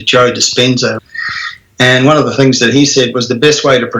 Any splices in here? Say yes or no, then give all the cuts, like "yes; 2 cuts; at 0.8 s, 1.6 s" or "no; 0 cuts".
yes; 1 cut; at 1.0 s